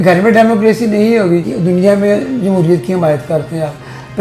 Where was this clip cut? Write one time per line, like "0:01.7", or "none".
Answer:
0:01.5

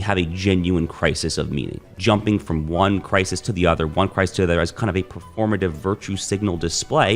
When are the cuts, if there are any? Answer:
0:01.9

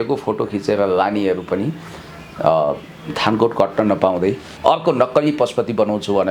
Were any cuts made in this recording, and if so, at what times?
none

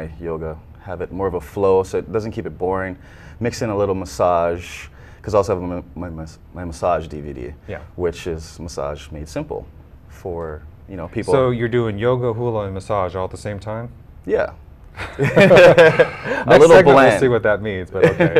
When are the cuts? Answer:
none

